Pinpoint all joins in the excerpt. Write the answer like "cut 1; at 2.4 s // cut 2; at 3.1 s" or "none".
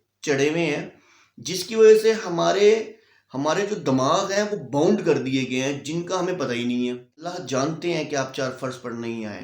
cut 1; at 7.4 s